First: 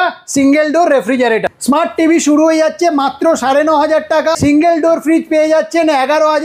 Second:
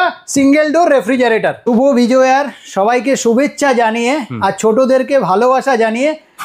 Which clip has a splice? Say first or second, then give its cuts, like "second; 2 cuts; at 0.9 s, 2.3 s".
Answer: first; 2 cuts; at 1.5 s, 4.4 s